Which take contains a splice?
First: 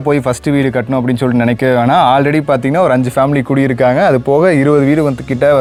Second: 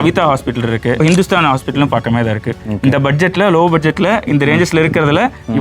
second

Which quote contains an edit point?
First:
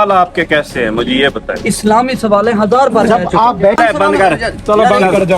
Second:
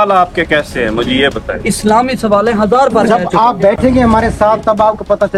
first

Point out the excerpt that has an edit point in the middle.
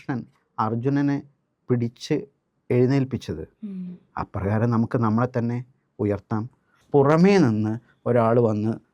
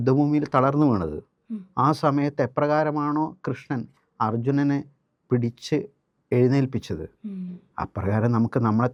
first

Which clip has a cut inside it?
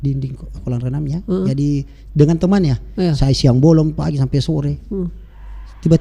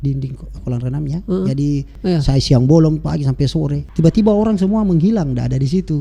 second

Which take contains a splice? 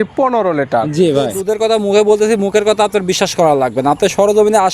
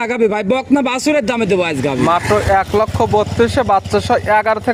first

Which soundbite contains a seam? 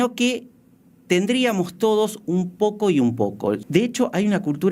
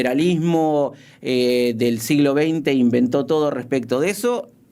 first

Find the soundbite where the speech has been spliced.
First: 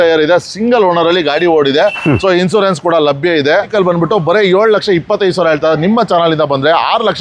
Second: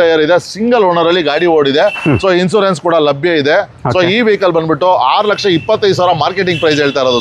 first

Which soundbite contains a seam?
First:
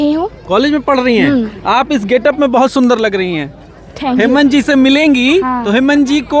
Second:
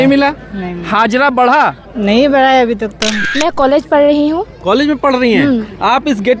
second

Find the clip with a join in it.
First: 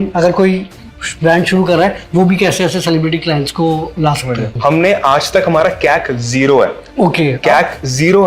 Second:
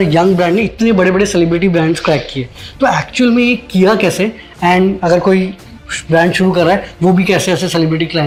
first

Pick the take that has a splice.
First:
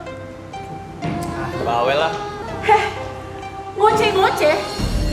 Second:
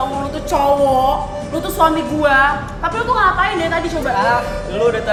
first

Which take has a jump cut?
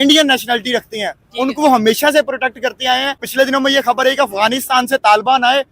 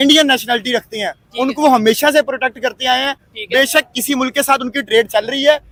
first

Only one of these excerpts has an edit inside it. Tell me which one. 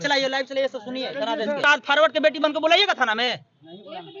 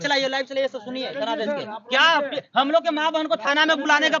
first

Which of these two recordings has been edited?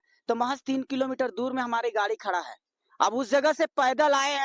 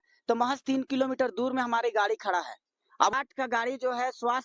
second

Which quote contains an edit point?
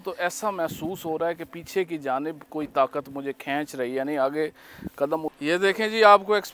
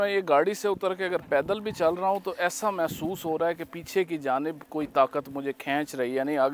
first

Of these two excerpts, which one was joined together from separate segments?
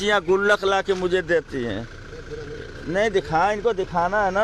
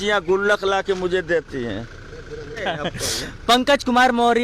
second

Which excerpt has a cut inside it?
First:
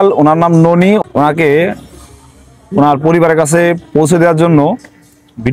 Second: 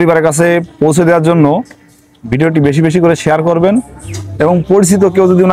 first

